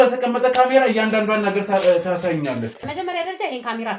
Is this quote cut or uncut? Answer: cut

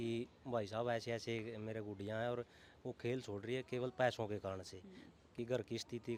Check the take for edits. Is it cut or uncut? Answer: uncut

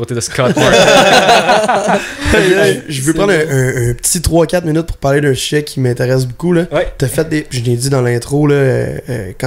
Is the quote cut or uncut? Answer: uncut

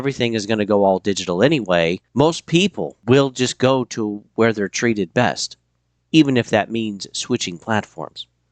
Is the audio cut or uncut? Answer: cut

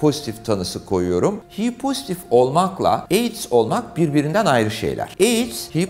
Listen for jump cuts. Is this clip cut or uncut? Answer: cut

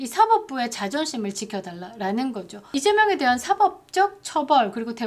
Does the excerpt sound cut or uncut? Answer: cut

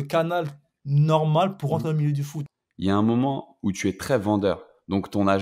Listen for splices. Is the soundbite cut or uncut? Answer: cut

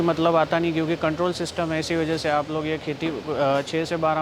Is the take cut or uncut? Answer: uncut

